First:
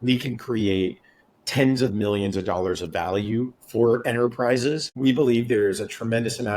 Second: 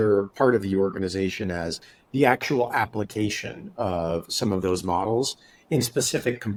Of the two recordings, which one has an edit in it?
first; 1 cut; at 4.9 s

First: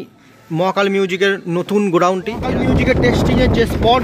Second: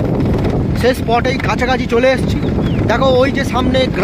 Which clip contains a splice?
first; 1 cut; at 2.4 s

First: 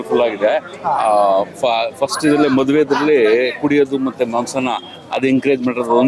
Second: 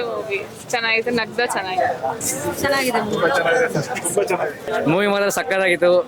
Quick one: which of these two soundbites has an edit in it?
second; 2 cuts; at 2.2 s, 4.7 s

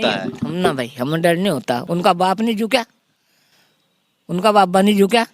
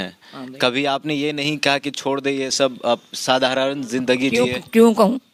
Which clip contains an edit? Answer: first; 1 cut; at 1.8 s

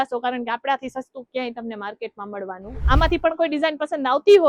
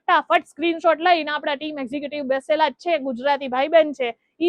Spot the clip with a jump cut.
first; 1 cut; at 2.7 s

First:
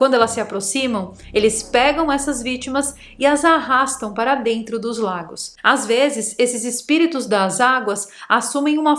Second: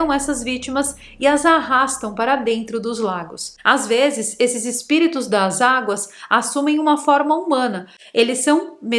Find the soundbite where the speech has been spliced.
second; 1 cut; at 8.0 s

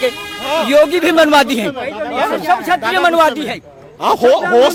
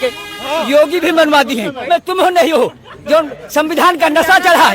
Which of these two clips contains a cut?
second; 1 cut; at 1.8 s

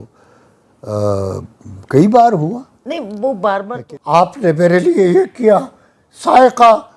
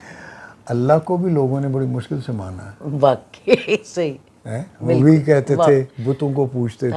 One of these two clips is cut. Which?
first; 1 cut; at 3.7 s

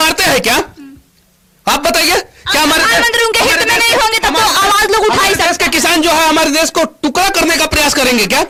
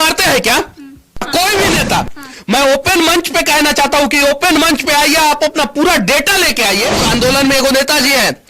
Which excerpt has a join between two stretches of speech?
second; 2 cuts; at 1.3 s, 7.0 s

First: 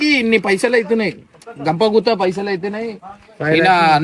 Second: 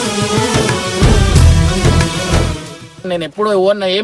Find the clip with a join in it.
second; 1 cut; at 3.1 s

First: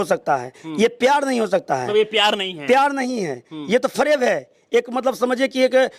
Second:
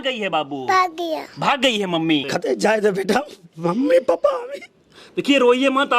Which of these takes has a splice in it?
second; 1 cut; at 2.3 s

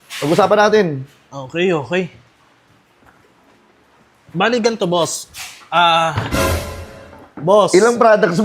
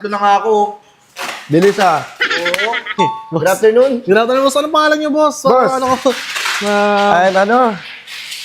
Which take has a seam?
second; 1 cut; at 2.9 s

